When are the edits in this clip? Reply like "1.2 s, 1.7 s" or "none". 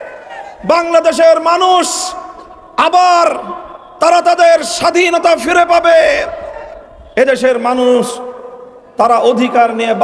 none